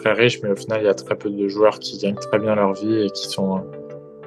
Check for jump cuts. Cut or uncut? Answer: uncut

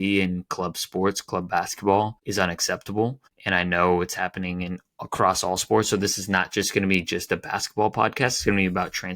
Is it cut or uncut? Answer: cut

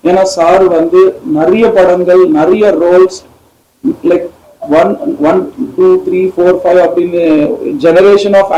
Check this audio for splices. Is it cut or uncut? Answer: uncut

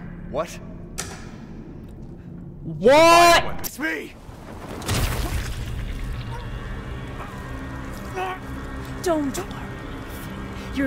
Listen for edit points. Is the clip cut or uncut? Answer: cut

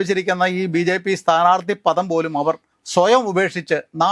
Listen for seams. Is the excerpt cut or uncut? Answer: cut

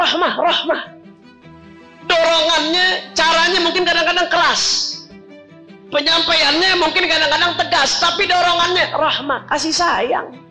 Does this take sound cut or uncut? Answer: uncut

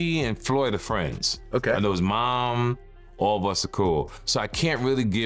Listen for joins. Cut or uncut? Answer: uncut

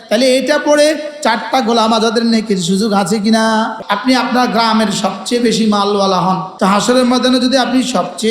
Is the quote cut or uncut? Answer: cut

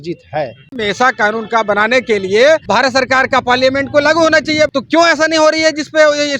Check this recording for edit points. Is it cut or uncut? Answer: cut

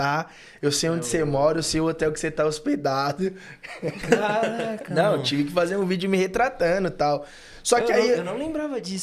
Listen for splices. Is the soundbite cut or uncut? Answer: uncut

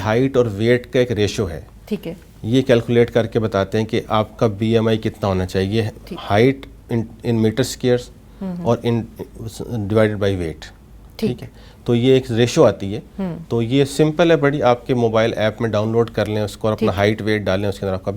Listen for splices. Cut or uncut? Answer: uncut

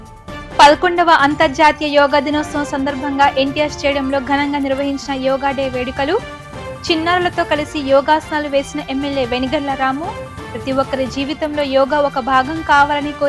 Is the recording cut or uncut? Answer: uncut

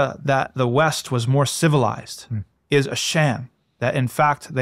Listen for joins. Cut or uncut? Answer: uncut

